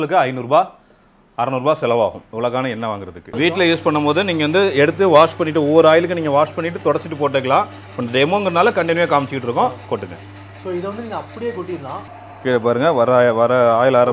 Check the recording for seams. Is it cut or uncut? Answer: uncut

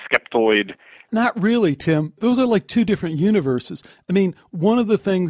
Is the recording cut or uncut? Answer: cut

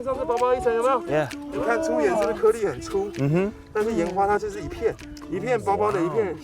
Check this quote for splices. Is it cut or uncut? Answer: cut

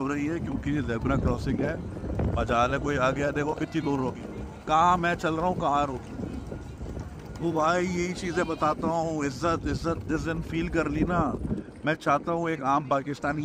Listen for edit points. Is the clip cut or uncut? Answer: uncut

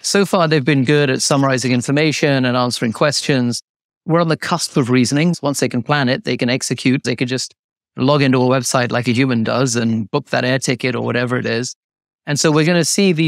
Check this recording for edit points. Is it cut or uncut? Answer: cut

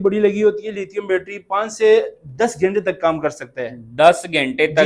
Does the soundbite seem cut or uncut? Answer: uncut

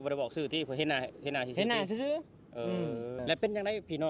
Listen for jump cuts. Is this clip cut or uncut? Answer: cut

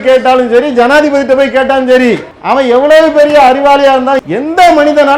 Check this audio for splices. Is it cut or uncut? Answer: cut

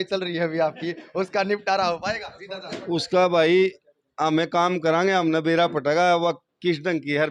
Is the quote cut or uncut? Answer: uncut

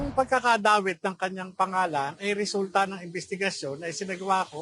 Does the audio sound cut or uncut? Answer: uncut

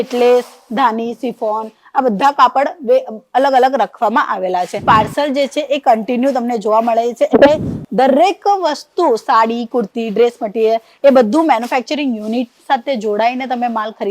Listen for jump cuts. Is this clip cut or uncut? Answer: cut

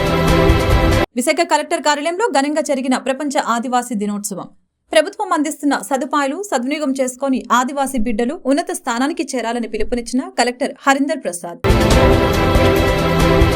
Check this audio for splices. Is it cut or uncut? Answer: cut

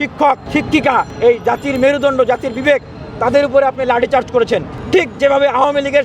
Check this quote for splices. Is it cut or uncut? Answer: cut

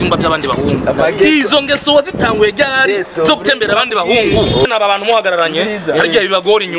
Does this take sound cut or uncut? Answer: cut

